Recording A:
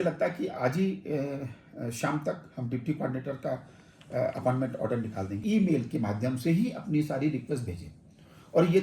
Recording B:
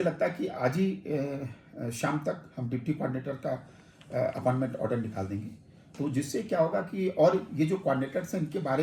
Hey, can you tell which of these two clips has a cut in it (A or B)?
A